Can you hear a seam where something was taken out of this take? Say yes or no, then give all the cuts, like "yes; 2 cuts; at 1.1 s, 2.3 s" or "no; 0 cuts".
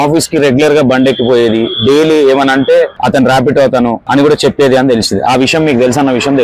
yes; 2 cuts; at 3.0 s, 4.0 s